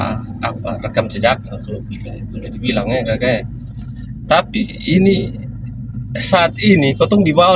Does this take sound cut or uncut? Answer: uncut